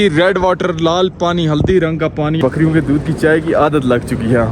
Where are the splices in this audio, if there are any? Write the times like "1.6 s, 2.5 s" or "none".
2.4 s